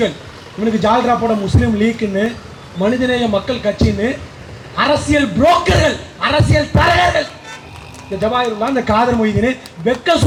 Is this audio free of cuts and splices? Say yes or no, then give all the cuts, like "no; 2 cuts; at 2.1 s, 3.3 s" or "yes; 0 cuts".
yes; 0 cuts